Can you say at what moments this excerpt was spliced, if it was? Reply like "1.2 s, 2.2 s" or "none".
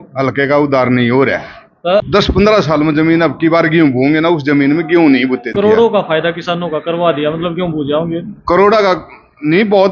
2.0 s, 5.6 s